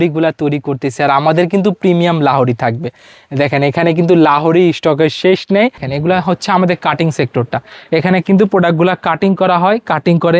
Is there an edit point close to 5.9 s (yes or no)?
yes